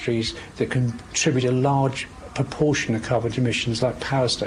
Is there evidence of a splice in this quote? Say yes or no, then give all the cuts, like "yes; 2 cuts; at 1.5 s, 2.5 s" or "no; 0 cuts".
no; 0 cuts